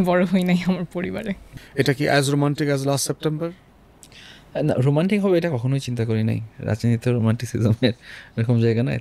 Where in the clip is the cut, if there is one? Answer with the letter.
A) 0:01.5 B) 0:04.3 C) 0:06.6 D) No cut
A